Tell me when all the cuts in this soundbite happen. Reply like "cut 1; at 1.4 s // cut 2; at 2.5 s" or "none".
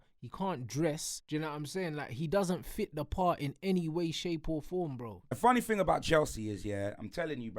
cut 1; at 1.1 s // cut 2; at 5.4 s

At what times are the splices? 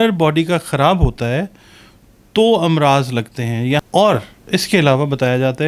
cut 1; at 3.8 s

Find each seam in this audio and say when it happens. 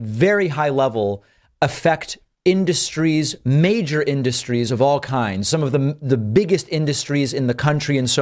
none

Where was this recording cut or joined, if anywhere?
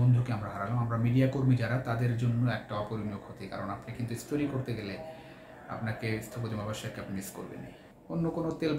cut 1; at 7.8 s

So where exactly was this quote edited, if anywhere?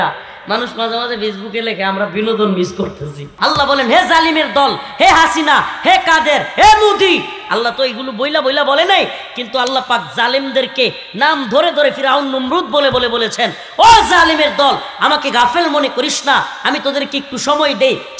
cut 1; at 3.3 s

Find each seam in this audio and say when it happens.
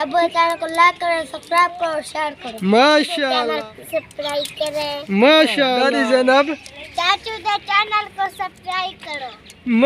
cut 1; at 3.3 s // cut 2; at 5.8 s

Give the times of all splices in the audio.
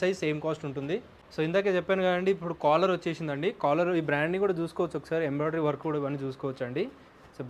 none

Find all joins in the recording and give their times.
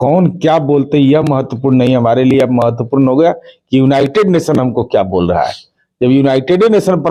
none

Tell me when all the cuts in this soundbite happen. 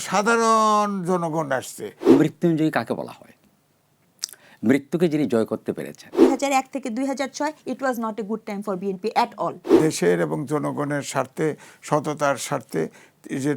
cut 1; at 2.1 s // cut 2; at 6.2 s // cut 3; at 9.7 s

